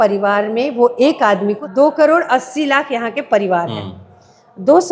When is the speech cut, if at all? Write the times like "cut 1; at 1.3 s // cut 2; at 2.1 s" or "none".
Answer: cut 1; at 1.6 s